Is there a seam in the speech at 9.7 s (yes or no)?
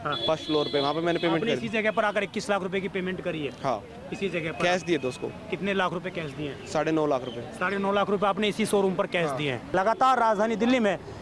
yes